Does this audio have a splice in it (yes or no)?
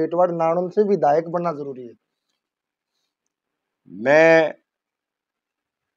no